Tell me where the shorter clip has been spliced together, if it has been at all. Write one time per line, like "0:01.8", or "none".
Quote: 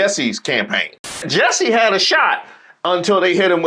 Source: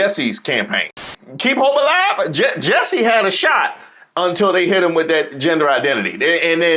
0:01.3

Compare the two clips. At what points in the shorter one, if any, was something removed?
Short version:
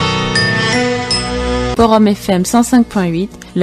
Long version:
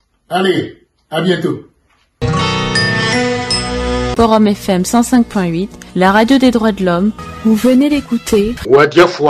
none

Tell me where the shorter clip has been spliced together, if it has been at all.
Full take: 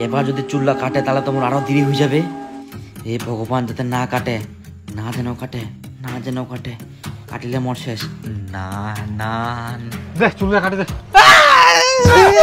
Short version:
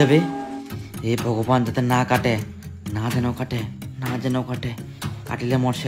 none

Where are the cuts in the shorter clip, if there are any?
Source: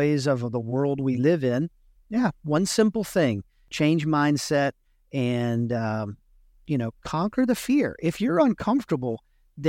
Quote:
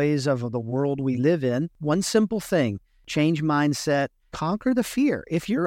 0:01.8
0:04.3

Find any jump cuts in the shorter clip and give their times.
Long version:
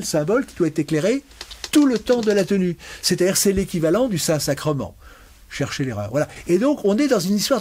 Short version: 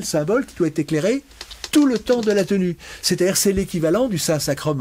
none

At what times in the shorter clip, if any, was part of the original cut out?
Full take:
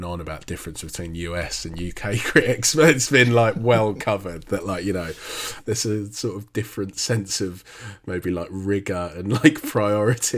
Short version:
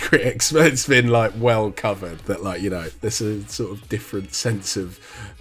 0:02.9

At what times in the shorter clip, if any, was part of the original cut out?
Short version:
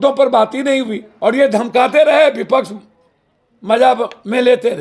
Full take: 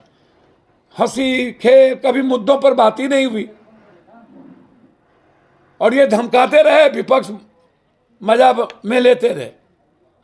0:01.0

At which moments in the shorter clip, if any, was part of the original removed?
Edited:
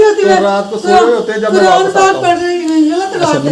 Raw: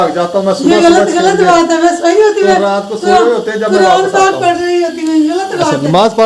0:02.6

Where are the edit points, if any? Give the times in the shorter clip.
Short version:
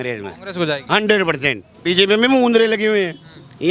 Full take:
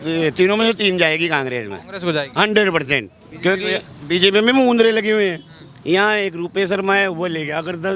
0:01.7

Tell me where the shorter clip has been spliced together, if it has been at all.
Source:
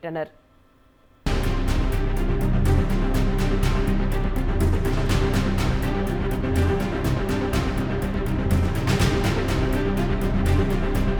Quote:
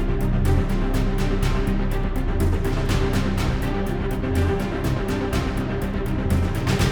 none

